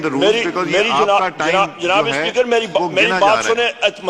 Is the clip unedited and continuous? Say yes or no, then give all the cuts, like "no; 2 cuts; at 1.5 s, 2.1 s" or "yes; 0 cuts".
yes; 0 cuts